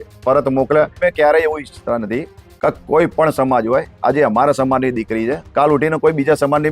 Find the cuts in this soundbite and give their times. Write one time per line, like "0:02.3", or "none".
0:01.0